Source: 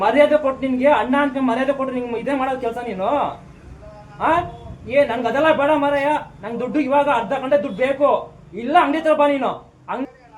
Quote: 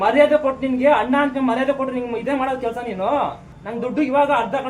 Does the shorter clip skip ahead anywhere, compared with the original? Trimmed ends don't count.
yes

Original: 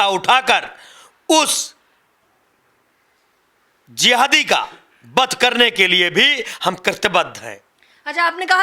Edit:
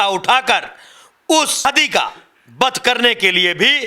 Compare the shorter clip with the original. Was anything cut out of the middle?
yes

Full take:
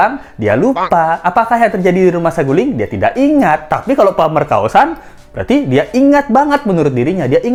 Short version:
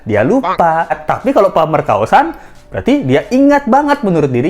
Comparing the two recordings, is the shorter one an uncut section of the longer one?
no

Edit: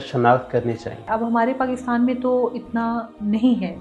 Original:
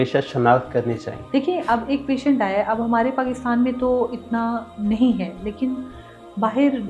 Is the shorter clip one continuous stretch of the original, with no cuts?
no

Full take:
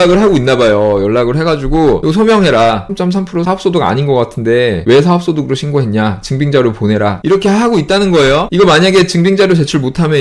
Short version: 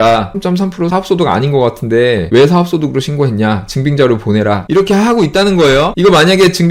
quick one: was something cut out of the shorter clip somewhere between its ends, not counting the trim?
no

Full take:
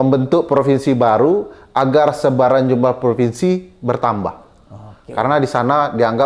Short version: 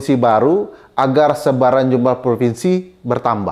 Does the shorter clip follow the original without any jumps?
yes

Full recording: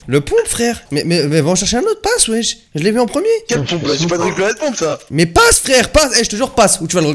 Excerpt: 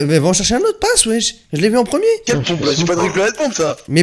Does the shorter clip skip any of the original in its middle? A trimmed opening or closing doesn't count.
no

